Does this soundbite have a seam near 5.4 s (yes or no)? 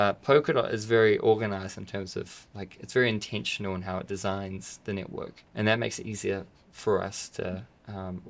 yes